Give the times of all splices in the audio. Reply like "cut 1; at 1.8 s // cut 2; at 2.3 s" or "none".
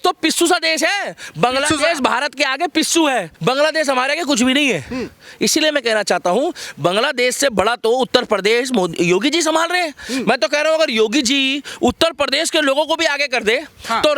cut 1; at 3.3 s